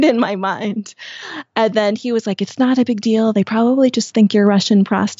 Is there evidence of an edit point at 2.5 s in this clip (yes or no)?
no